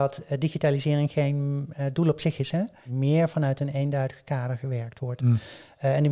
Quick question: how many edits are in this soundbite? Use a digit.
1